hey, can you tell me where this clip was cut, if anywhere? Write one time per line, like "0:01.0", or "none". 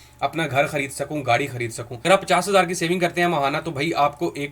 0:01.9